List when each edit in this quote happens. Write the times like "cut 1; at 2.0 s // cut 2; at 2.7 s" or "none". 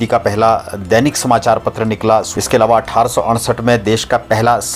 cut 1; at 2.3 s